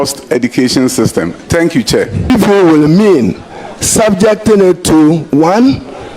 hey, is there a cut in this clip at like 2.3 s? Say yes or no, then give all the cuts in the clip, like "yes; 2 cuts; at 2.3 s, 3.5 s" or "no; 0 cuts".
yes; 1 cut; at 2.3 s